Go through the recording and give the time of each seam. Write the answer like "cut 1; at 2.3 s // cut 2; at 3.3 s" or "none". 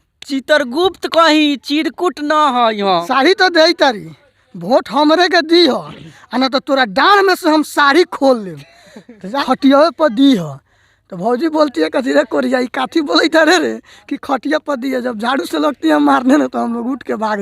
cut 1; at 3.1 s // cut 2; at 9.4 s